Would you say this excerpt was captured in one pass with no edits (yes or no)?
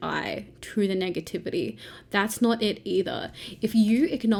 yes